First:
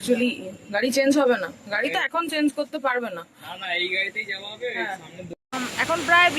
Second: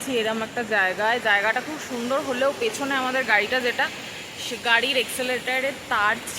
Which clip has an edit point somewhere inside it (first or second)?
first